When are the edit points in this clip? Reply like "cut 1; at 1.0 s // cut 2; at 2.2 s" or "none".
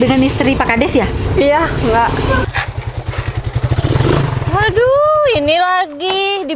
cut 1; at 2.5 s